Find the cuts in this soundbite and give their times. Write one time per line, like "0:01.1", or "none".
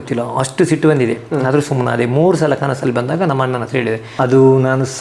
0:04.1